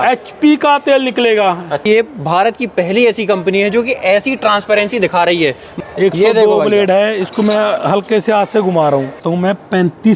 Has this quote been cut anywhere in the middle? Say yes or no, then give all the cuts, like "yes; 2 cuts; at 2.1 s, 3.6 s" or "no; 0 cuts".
yes; 3 cuts; at 1.8 s, 5.7 s, 9.2 s